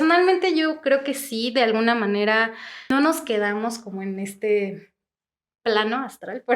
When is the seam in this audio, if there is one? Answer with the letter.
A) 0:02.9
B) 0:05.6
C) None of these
A